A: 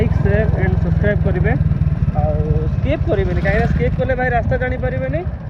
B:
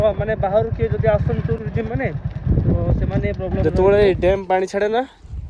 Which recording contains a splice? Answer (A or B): B